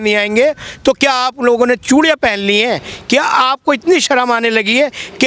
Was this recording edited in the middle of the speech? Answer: no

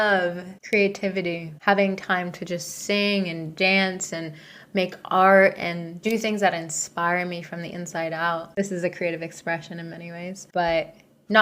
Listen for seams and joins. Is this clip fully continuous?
no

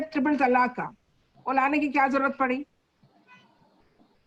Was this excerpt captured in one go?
yes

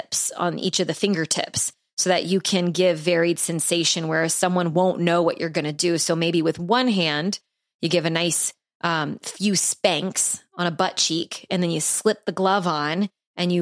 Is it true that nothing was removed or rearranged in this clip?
yes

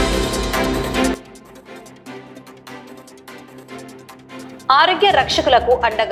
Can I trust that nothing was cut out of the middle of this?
yes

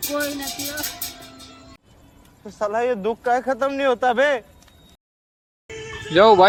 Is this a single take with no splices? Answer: yes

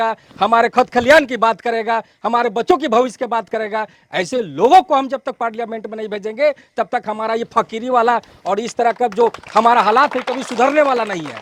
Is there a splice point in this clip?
no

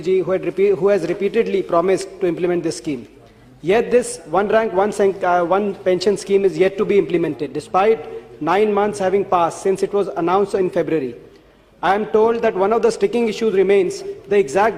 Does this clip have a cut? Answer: no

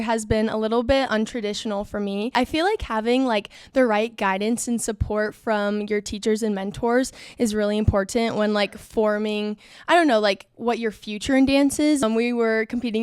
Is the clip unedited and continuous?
no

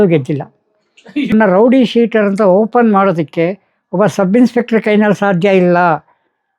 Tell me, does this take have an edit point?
yes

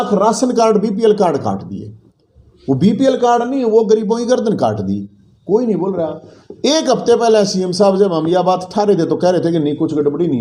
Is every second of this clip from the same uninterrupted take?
yes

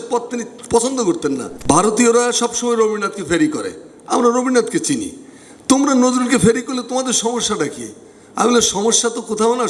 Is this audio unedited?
no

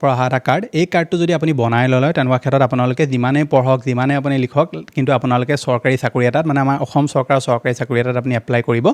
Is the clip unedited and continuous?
yes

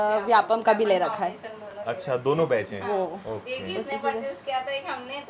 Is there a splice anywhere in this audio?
no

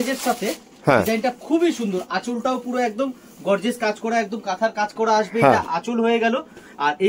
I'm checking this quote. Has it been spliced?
no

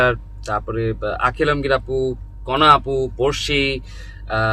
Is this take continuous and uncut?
yes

